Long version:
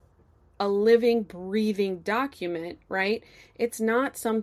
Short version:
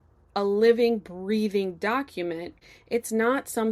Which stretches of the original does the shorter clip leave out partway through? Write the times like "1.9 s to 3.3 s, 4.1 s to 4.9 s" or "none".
2.8 s to 3.3 s